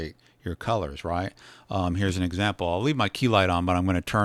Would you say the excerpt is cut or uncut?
uncut